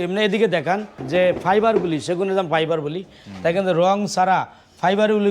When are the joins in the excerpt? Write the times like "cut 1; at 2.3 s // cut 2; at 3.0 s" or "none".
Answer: cut 1; at 0.9 s